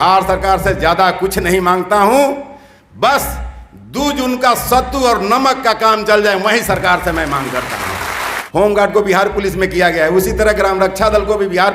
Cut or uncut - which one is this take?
cut